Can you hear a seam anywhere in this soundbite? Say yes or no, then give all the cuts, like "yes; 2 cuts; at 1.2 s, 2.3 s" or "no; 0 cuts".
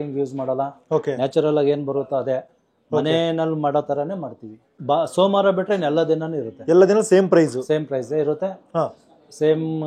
no; 0 cuts